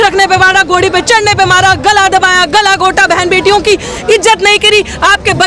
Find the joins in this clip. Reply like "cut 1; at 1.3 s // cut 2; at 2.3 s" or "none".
none